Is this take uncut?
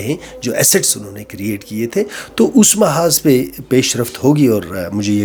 yes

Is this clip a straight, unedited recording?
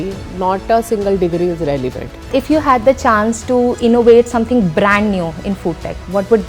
no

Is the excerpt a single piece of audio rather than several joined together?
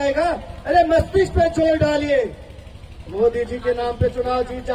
yes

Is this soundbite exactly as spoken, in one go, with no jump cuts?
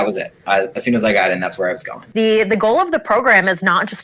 no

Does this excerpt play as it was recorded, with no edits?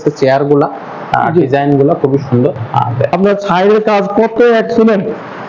no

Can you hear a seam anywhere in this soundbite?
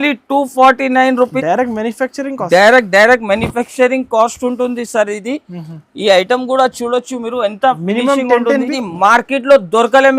yes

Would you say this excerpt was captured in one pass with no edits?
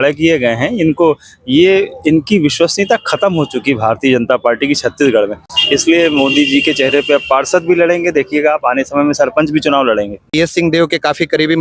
no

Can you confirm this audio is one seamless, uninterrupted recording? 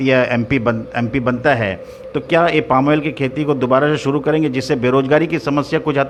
yes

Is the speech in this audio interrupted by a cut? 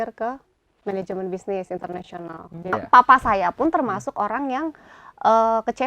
yes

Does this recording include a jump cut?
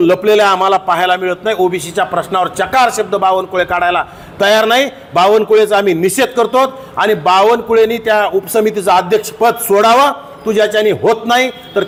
no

